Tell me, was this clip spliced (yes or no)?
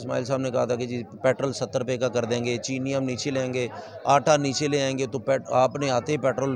no